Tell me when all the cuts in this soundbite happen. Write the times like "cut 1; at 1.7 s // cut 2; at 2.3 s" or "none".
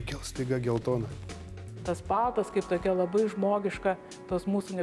cut 1; at 1.6 s